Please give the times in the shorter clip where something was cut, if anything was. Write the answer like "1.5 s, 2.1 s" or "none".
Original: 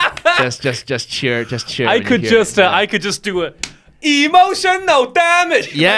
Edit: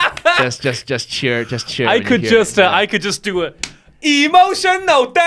none